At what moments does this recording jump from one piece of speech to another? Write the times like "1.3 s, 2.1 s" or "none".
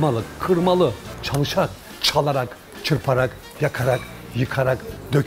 1.0 s